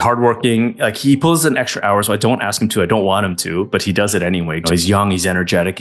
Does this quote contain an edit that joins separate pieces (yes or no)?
yes